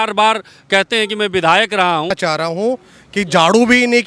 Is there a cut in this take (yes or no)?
yes